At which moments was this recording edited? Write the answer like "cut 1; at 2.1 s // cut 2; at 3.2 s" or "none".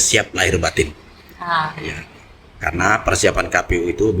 none